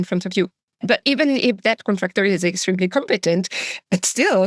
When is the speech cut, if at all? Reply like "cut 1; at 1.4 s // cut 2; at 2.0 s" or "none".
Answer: cut 1; at 0.9 s